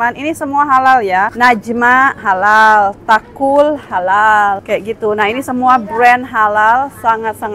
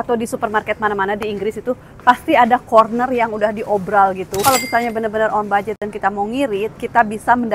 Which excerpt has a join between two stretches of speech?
first; 2 cuts; at 1.3 s, 4.6 s

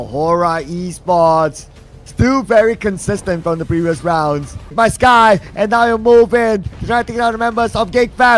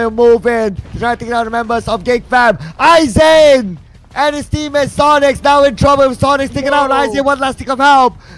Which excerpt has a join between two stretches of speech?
first; 1 cut; at 4.7 s

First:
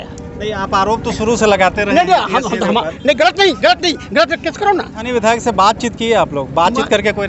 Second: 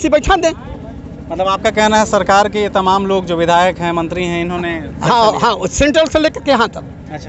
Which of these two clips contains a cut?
first; 1 cut; at 5.0 s

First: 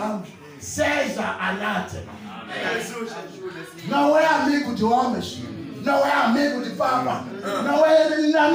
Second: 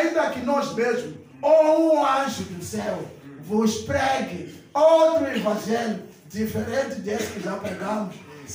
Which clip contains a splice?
first; 1 cut; at 2.6 s

